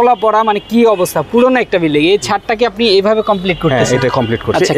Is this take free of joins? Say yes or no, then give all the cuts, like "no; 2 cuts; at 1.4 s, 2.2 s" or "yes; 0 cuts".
yes; 0 cuts